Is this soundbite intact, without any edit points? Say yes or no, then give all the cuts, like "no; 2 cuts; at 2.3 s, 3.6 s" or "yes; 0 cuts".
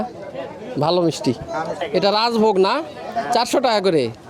no; 1 cut; at 1.8 s